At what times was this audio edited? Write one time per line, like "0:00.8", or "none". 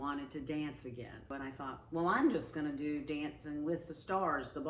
0:01.3